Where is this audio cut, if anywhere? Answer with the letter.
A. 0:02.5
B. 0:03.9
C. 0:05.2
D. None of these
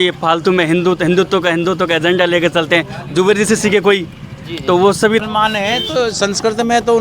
C